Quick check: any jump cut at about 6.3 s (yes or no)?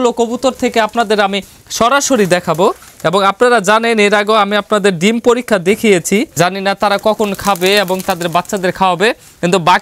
yes